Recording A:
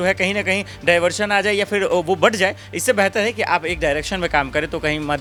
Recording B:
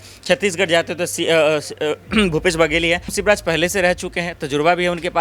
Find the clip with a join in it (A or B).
B